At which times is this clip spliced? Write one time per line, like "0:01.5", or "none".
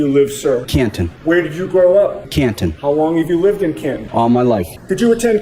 none